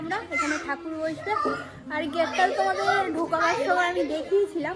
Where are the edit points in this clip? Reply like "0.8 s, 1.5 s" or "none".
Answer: none